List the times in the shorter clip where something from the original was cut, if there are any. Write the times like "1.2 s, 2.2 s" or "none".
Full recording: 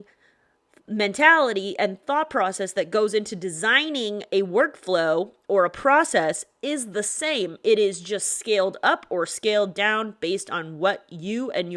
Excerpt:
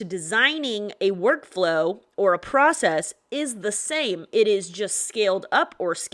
none